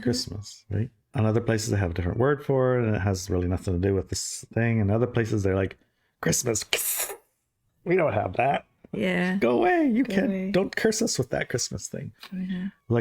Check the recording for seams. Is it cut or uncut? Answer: cut